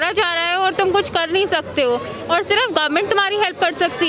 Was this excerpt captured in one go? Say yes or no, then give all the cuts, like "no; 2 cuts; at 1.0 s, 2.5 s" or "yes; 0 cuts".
yes; 0 cuts